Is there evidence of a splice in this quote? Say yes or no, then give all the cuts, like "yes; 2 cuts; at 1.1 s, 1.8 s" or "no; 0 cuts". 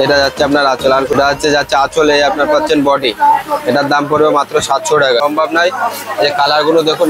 yes; 2 cuts; at 1.2 s, 5.2 s